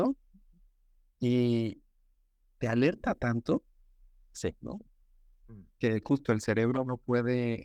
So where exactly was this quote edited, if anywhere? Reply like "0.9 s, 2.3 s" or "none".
none

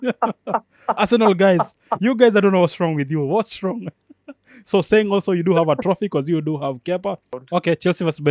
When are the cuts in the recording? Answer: 7.4 s

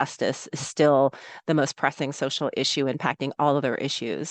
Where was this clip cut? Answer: none

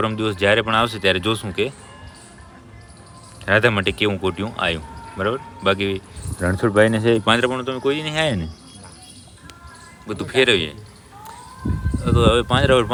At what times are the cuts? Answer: none

